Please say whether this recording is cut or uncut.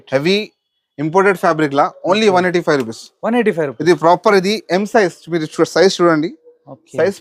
uncut